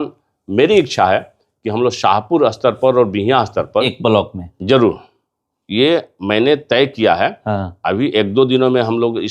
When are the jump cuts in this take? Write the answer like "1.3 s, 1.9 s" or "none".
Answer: 3.9 s